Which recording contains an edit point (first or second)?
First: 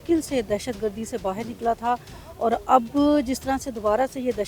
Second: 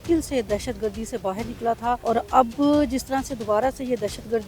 second